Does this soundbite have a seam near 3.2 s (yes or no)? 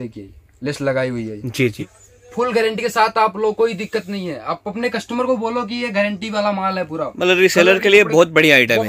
no